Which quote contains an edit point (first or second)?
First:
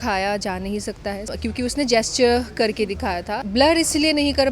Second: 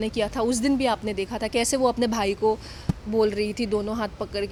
first